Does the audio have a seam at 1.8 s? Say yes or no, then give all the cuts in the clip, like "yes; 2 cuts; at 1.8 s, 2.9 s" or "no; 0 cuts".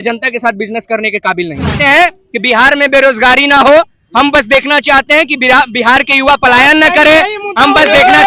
yes; 1 cut; at 1.8 s